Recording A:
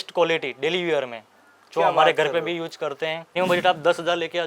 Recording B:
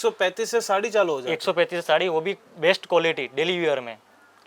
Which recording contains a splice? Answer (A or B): A